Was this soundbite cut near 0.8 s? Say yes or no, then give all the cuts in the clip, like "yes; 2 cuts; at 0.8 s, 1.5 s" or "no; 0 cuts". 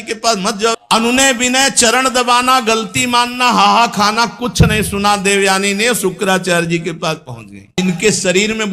yes; 2 cuts; at 0.8 s, 7.8 s